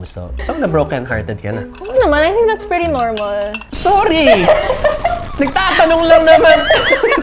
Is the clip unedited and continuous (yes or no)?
yes